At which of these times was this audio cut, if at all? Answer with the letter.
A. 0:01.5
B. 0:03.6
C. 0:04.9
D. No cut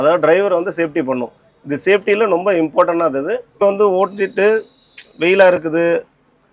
B